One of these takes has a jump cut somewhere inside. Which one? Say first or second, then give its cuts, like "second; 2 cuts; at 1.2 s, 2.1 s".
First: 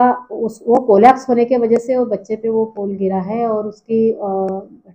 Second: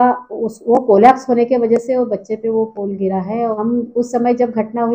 second; 1 cut; at 3.6 s